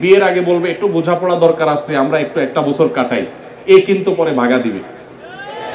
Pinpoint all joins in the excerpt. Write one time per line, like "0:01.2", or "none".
none